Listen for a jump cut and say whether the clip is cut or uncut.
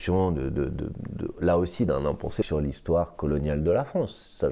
cut